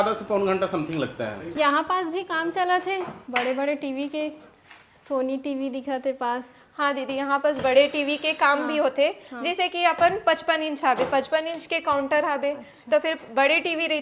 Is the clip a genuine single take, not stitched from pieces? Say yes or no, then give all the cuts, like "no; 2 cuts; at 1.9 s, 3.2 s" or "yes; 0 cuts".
no; 1 cut; at 1.4 s